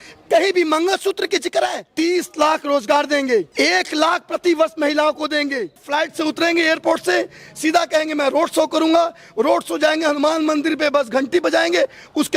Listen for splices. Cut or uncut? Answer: cut